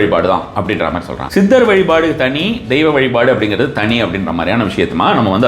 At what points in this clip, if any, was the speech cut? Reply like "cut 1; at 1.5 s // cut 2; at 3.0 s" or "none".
cut 1; at 1.1 s